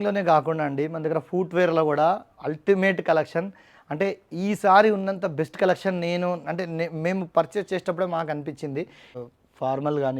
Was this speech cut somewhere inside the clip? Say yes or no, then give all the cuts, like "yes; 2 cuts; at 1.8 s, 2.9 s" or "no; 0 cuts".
yes; 1 cut; at 9.0 s